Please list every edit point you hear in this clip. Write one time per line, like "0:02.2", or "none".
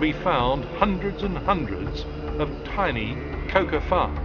0:01.9